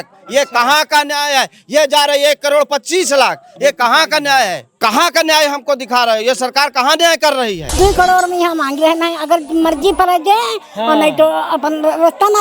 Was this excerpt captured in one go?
no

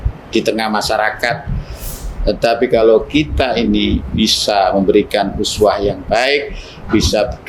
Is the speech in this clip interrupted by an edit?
yes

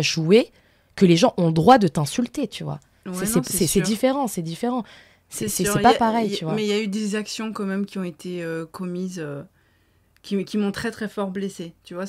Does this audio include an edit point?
no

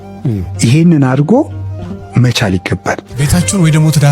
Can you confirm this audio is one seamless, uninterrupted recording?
no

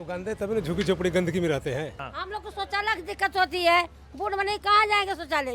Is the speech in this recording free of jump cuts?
no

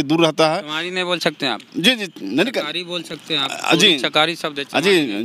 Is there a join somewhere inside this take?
no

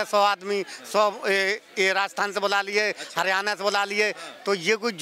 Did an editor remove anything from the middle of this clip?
no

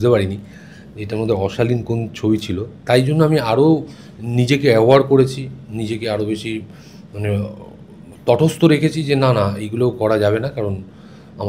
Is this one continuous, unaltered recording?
yes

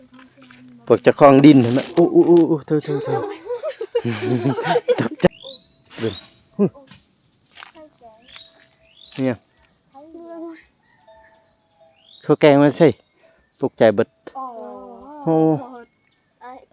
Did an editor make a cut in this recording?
yes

